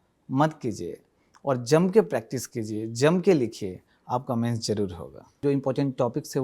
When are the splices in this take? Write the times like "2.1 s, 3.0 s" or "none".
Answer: 5.4 s